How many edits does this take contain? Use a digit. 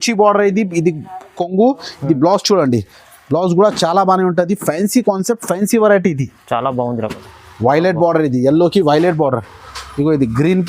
1